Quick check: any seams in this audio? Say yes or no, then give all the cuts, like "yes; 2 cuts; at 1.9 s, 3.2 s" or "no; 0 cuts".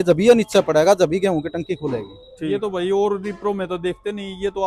yes; 1 cut; at 2.5 s